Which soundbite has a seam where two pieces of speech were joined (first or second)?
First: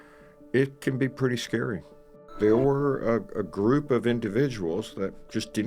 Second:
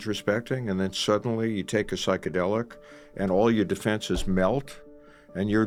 first